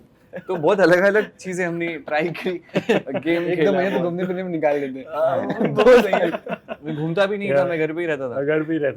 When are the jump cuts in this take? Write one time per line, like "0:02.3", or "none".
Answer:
none